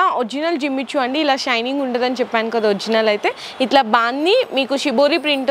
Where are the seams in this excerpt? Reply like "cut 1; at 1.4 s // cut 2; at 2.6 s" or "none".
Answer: none